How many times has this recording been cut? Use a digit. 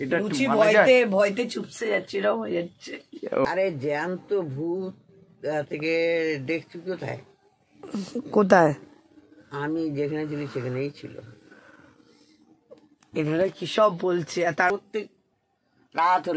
2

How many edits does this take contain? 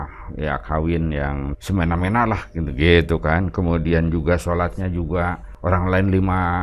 2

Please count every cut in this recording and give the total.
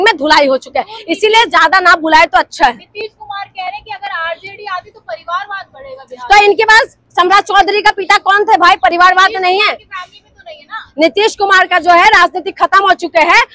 0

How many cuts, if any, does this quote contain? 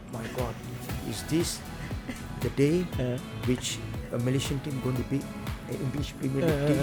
0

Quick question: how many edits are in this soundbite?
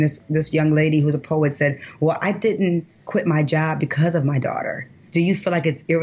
1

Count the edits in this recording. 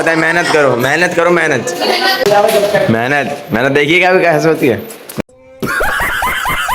0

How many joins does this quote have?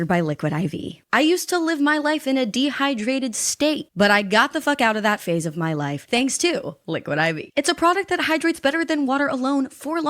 1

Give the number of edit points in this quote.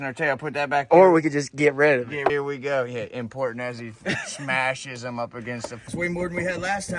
2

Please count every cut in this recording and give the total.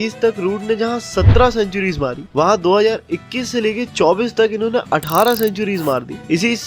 0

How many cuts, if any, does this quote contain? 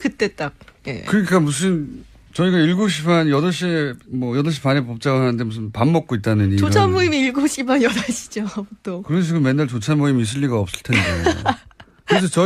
0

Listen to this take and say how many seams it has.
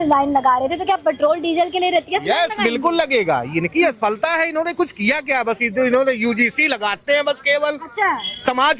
0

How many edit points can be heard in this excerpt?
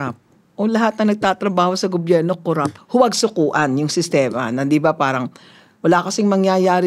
1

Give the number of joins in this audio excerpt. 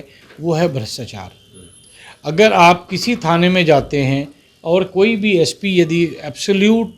0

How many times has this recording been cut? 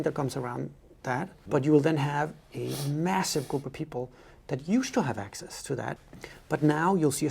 2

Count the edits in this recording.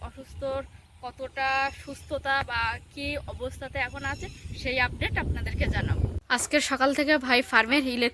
1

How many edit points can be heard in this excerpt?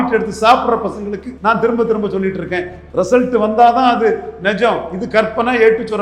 2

